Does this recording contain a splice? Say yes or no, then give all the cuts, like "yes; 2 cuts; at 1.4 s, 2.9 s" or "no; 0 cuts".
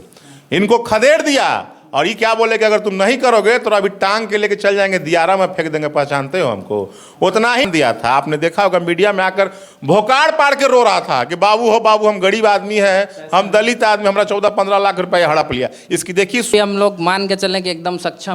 yes; 2 cuts; at 7.6 s, 16.5 s